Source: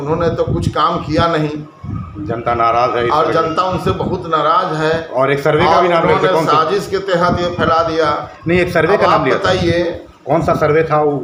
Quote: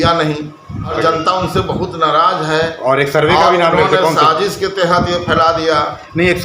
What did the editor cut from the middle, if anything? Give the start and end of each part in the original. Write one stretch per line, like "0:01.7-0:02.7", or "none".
0:02.1-0:03.2